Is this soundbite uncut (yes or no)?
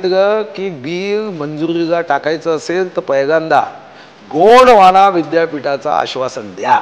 yes